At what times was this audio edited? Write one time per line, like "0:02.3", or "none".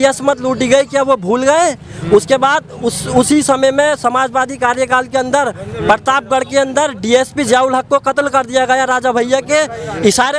none